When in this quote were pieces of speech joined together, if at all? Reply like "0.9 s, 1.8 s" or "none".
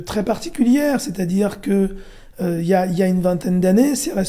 none

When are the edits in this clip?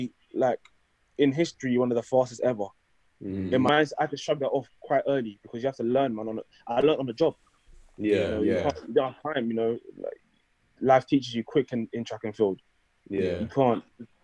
3.7 s

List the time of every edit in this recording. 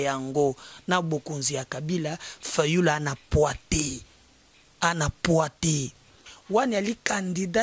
6.3 s

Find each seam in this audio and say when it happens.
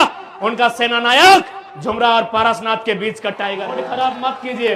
3.7 s

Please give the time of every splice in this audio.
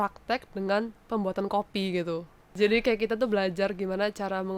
2.5 s

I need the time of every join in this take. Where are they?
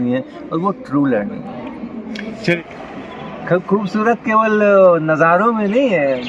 2.6 s

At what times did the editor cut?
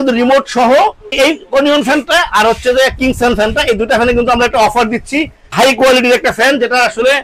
1.0 s, 5.5 s

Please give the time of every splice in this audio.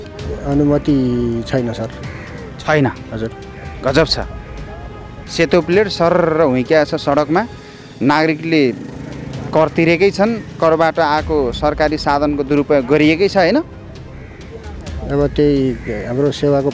none

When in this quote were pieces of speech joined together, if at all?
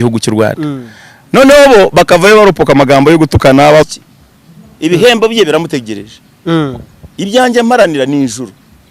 3.9 s

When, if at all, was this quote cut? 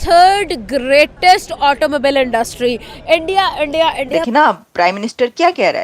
4.3 s

